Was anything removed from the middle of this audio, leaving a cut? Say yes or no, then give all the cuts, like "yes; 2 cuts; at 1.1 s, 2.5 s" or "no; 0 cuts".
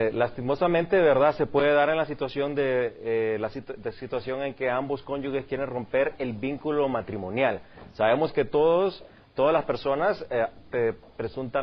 no; 0 cuts